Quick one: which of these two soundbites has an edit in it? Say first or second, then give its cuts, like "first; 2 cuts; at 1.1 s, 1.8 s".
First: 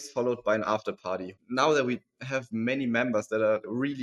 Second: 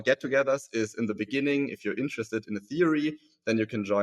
first; 1 cut; at 1.3 s